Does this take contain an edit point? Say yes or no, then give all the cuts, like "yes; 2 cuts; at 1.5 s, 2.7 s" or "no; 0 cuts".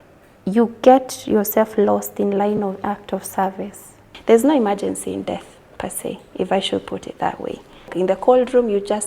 yes; 2 cuts; at 4.1 s, 7.9 s